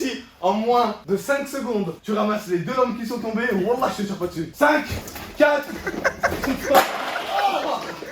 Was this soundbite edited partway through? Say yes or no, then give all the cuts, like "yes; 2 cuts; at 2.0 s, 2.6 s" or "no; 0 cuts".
yes; 3 cuts; at 1.0 s, 2.0 s, 4.6 s